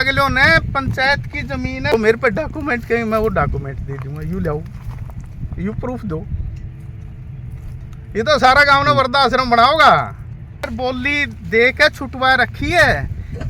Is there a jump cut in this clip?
yes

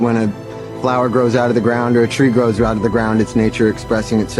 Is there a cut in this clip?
no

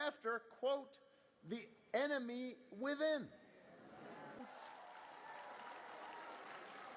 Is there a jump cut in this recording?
yes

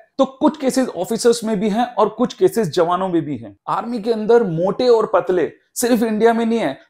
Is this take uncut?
no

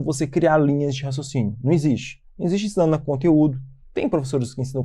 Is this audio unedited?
yes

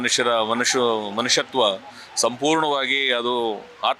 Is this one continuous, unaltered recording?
yes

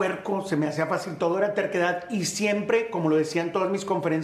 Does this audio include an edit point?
no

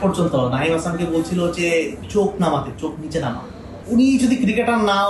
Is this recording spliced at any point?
yes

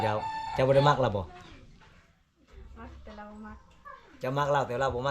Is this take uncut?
yes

